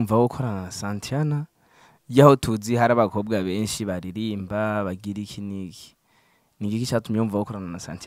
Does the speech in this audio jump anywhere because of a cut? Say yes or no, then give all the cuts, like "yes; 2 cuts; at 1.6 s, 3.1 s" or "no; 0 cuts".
no; 0 cuts